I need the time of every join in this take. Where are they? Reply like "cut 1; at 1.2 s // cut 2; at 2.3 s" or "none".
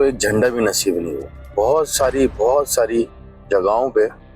cut 1; at 1.5 s